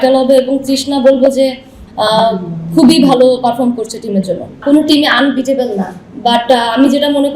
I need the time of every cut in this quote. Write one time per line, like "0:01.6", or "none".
0:04.6